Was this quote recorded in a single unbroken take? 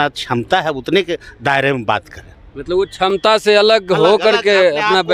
yes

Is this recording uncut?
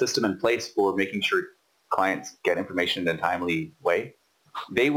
yes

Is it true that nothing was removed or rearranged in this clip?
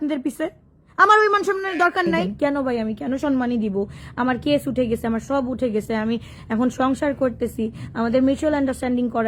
no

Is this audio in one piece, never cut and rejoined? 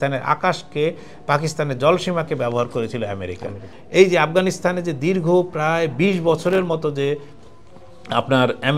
no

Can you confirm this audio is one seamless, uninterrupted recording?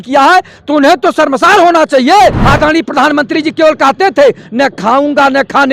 no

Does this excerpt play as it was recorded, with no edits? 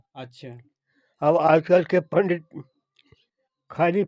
yes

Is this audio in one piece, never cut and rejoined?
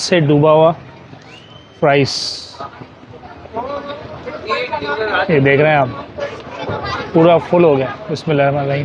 yes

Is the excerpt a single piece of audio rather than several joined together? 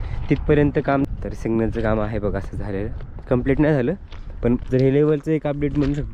no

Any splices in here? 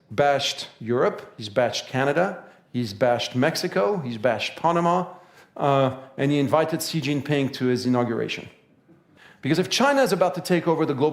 yes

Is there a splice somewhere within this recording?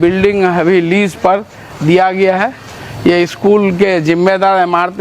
no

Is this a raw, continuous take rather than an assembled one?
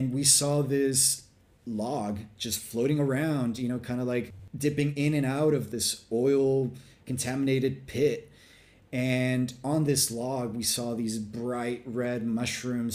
yes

